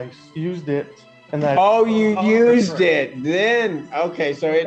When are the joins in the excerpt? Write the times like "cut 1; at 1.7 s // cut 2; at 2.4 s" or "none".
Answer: none